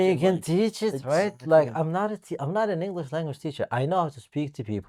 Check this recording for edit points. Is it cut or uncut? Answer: uncut